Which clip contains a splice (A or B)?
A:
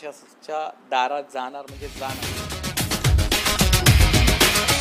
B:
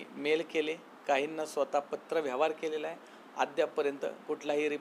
A